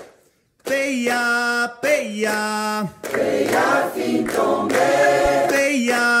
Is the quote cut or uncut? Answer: uncut